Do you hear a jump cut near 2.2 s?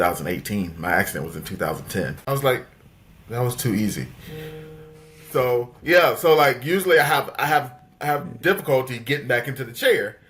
yes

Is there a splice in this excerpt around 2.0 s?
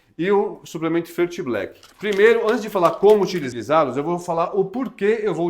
no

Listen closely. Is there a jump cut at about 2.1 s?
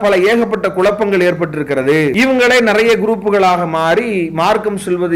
yes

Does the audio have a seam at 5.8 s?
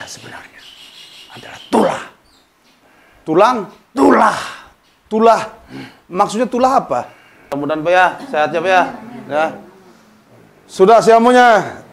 no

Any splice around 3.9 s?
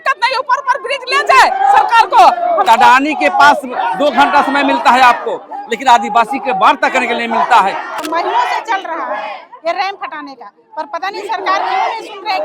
no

